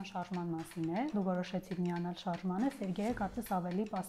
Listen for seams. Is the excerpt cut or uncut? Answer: cut